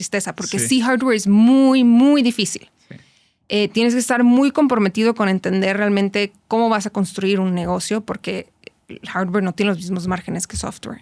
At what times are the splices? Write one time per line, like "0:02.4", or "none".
none